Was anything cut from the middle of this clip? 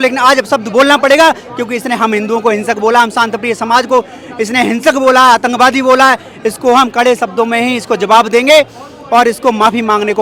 no; 0 cuts

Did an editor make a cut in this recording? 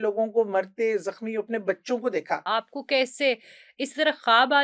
yes; 1 cut; at 2.5 s

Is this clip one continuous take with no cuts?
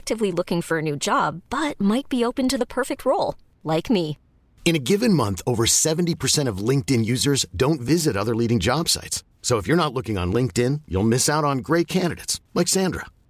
yes; 0 cuts

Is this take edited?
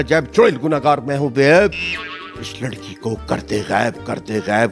no; 0 cuts

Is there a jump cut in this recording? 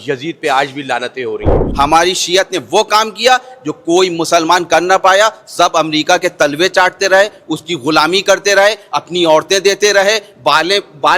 yes; 1 cut; at 1.6 s

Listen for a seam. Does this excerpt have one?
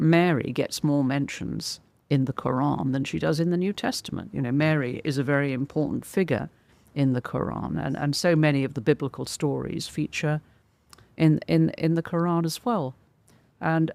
no; 0 cuts

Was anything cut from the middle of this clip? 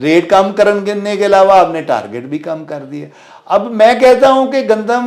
no; 0 cuts

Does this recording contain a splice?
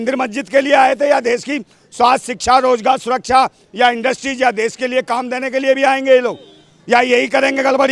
no; 0 cuts

